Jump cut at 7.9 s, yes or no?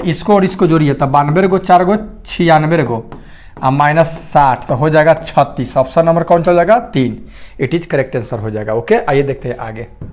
no